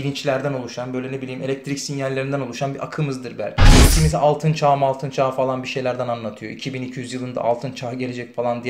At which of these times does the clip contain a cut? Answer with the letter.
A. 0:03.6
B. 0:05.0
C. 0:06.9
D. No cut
A